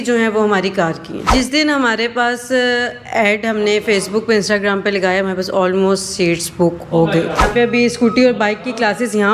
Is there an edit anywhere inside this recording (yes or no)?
yes